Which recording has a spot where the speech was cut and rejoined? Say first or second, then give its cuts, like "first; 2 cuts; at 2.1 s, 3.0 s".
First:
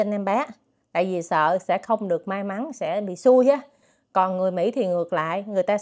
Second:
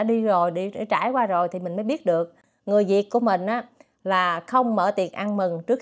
second; 1 cut; at 2.5 s